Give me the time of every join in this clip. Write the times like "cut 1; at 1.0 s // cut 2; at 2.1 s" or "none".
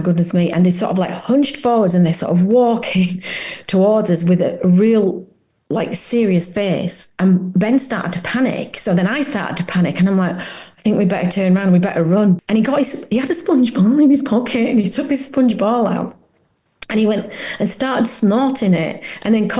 cut 1; at 7.0 s // cut 2; at 12.4 s